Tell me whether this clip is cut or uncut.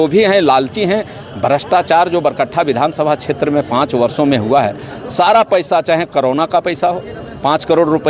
uncut